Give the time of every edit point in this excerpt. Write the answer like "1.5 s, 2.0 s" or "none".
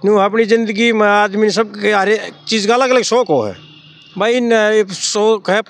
none